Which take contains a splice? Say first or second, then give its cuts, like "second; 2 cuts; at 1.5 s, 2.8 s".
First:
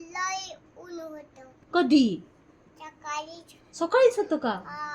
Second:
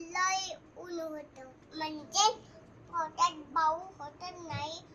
second; 1 cut; at 1.6 s